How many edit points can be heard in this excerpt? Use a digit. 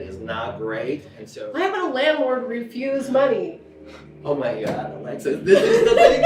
1